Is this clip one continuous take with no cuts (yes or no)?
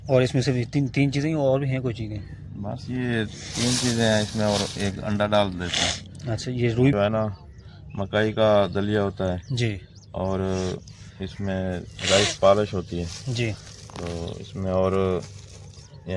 no